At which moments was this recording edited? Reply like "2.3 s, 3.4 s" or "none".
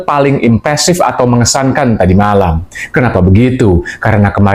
none